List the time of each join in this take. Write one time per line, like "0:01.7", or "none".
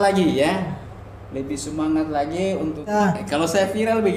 0:02.9